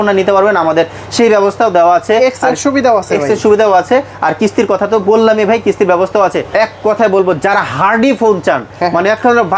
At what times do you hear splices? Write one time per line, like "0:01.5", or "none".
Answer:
0:06.4